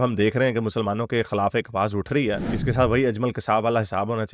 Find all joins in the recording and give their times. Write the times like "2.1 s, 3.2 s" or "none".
2.4 s